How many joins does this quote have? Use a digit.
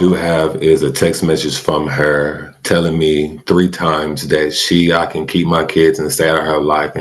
0